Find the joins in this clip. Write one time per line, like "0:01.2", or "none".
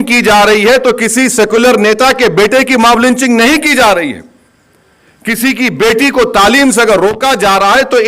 none